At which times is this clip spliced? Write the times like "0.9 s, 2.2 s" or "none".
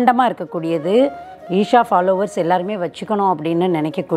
none